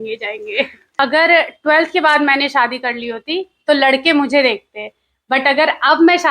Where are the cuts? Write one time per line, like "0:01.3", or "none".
0:01.0